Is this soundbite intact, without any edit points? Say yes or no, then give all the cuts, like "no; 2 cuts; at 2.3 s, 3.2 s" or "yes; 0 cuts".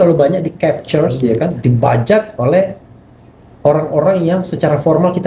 yes; 0 cuts